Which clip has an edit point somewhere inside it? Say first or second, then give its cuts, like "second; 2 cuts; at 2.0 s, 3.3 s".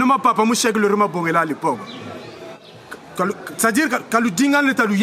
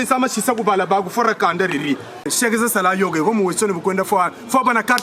second; 1 cut; at 2.3 s